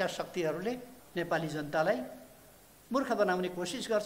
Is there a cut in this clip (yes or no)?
yes